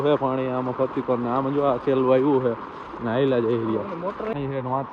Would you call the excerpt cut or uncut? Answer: uncut